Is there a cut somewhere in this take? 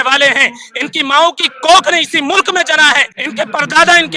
yes; 1 cut; at 3.2 s

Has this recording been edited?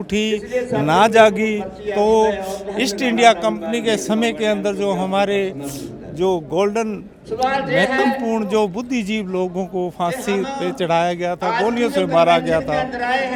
no; 0 cuts

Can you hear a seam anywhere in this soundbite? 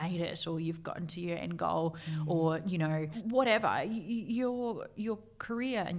yes; 1 cut; at 3.1 s

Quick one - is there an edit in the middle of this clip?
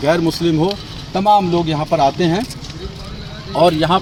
no; 0 cuts

